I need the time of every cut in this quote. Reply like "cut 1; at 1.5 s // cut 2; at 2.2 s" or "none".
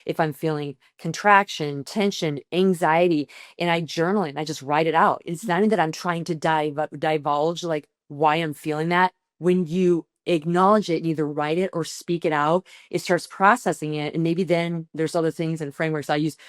none